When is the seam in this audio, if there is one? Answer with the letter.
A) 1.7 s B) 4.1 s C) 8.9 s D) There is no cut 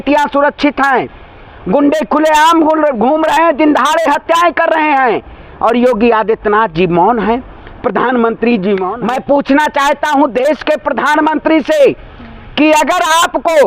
C